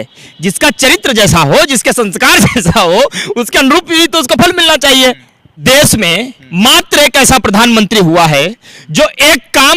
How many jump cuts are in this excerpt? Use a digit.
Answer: 1